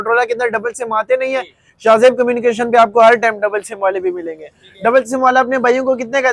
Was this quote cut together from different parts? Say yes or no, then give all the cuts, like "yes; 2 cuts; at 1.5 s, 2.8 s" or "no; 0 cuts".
no; 0 cuts